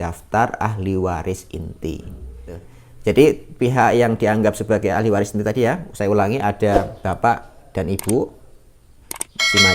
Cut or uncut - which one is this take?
cut